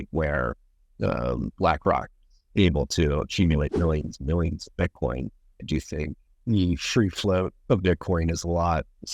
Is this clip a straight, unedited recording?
no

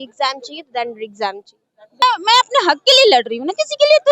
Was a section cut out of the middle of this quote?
yes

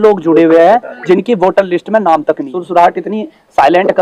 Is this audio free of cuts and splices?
no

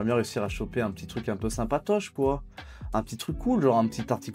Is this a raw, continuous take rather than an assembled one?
yes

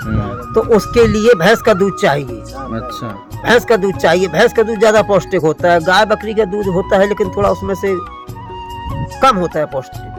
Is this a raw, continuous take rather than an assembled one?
yes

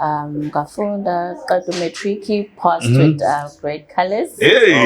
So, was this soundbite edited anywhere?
no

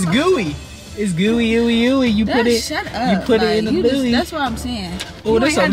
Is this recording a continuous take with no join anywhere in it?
yes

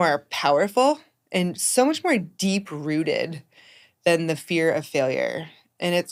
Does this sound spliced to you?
no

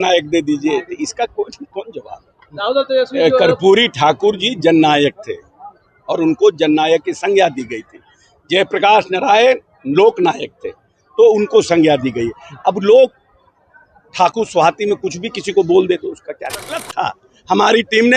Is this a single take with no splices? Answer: no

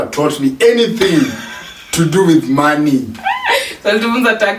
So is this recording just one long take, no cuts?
yes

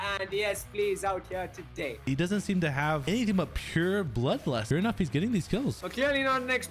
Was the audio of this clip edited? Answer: yes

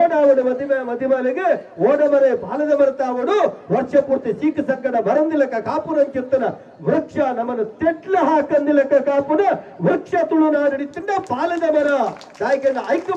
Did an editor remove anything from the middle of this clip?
no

